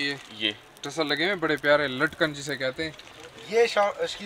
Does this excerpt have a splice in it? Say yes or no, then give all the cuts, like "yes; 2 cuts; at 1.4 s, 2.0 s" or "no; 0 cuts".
no; 0 cuts